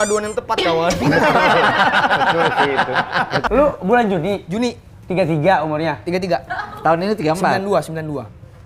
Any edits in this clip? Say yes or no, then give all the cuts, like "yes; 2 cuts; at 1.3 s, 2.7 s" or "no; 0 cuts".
yes; 2 cuts; at 3.5 s, 6.4 s